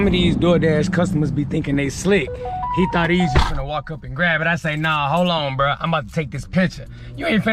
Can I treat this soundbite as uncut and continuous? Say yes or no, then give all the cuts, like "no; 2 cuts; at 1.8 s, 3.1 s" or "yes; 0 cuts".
yes; 0 cuts